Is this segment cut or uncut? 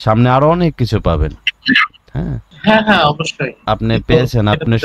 cut